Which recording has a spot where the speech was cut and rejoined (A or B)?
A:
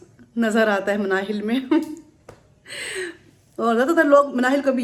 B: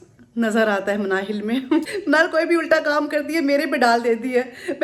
B